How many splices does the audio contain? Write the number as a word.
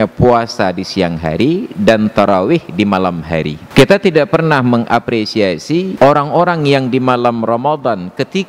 two